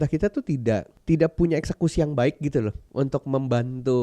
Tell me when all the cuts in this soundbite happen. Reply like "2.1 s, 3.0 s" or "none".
0.9 s, 2.8 s